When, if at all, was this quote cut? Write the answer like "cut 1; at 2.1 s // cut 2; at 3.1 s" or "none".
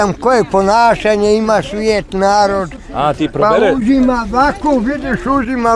none